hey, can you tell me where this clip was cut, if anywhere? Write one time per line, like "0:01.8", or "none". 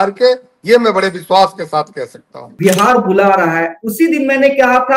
0:02.5

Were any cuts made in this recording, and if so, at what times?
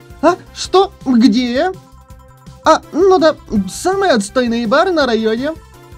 none

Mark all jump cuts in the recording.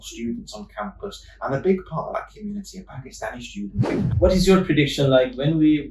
0:04.0

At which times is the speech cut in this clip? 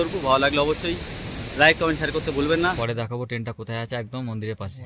0:02.8

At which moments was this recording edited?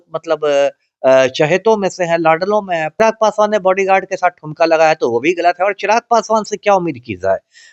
0:03.0

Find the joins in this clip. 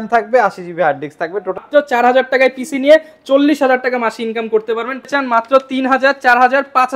0:01.6
0:05.1

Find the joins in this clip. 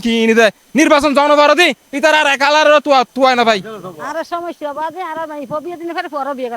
0:03.8

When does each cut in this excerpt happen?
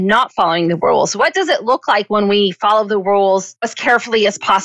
0:03.7

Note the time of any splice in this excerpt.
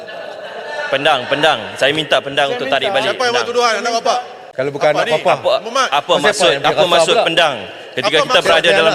0:04.4

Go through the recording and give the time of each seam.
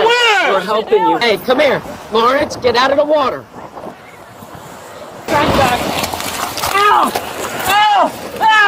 0:01.2
0:05.3

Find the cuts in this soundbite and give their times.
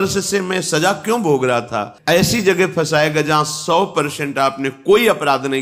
0:01.9

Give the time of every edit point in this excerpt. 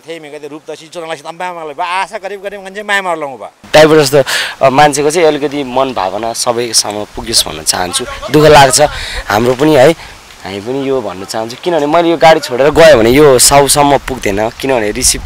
0:03.6

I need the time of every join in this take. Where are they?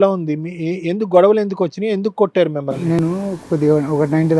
none

